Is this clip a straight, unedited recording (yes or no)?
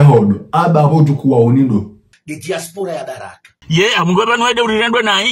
yes